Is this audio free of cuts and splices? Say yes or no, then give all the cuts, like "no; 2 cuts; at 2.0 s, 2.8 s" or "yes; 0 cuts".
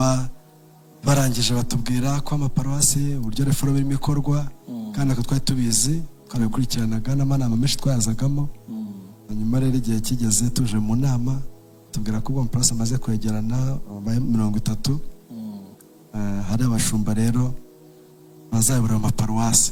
yes; 0 cuts